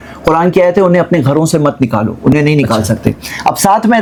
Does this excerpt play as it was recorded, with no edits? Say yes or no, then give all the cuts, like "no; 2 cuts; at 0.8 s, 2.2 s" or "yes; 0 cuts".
yes; 0 cuts